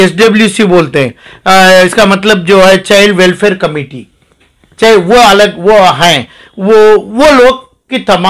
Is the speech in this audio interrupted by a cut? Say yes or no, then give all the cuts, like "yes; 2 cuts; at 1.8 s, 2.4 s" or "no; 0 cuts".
no; 0 cuts